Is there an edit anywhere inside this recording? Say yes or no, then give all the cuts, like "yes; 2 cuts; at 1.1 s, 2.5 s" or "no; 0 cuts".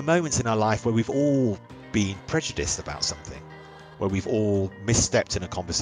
yes; 1 cut; at 1.7 s